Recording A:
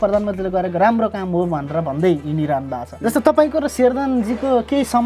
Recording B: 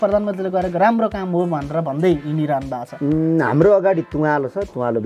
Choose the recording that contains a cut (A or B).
A